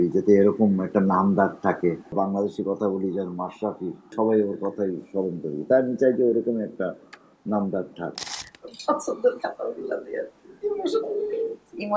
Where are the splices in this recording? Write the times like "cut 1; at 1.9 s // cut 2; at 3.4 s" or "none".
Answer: cut 1; at 2.1 s // cut 2; at 4.1 s // cut 3; at 8.3 s